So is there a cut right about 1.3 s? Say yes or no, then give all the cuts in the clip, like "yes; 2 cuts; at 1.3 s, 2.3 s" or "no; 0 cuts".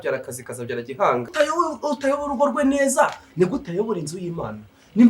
yes; 1 cut; at 1.3 s